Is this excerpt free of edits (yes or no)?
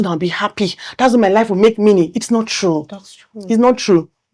yes